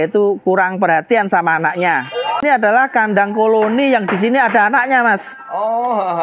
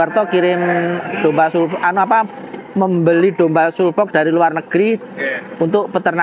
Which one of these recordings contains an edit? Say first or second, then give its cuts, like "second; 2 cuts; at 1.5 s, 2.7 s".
first; 1 cut; at 2.4 s